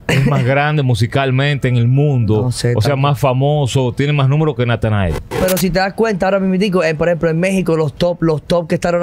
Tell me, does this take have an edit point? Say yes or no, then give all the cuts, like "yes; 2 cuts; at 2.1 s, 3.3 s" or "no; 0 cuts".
yes; 1 cut; at 5.4 s